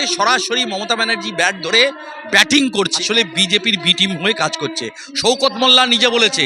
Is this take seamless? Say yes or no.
no